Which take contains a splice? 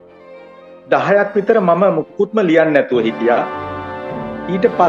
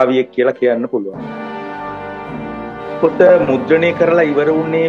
second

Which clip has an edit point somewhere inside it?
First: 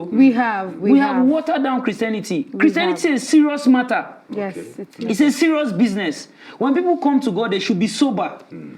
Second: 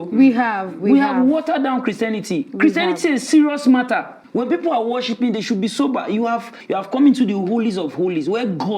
second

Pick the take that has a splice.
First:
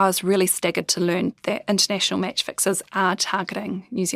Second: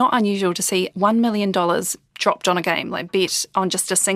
second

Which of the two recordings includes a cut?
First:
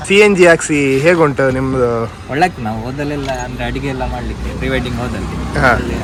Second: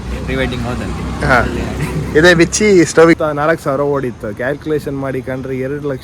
second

